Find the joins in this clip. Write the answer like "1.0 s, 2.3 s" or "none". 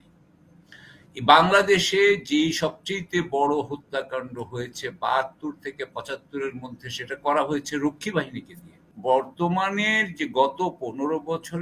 8.9 s